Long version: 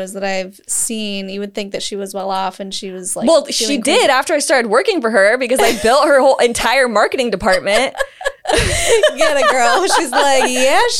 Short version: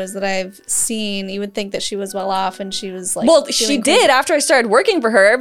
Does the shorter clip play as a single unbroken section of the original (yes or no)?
yes